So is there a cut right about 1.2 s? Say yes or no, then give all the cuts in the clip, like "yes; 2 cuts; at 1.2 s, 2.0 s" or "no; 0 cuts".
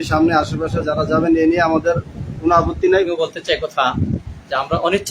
no; 1 cut; at 3.1 s